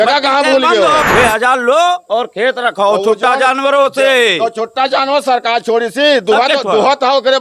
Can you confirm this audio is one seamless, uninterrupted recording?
no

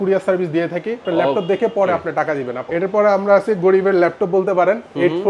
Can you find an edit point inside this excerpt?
yes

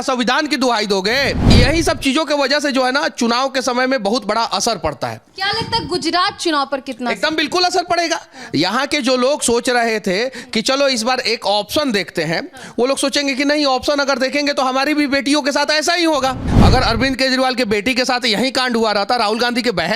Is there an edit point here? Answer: yes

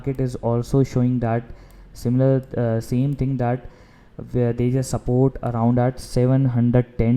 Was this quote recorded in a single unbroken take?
yes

